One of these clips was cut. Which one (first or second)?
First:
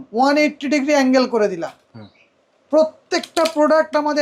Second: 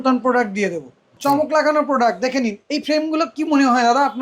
second